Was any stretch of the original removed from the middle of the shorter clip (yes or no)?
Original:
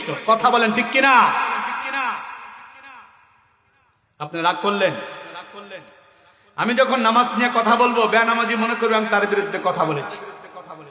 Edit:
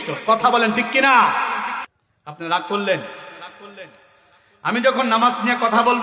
yes